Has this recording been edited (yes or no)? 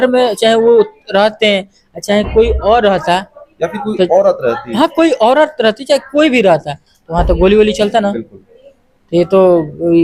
no